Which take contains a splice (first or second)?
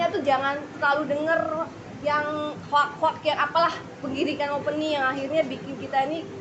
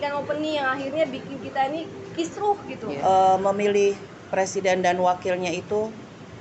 second